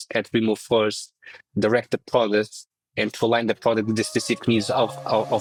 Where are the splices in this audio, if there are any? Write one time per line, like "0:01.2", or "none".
none